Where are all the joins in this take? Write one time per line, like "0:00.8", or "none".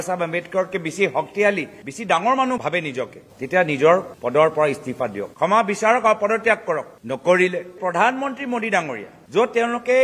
0:05.3
0:07.8